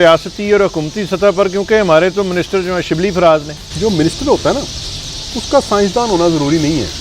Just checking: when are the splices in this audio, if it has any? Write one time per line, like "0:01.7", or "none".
0:03.6